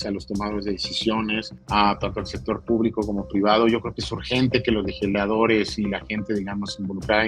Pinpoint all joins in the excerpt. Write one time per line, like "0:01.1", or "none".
0:01.5